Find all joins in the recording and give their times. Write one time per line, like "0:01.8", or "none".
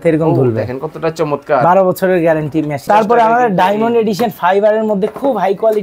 0:02.8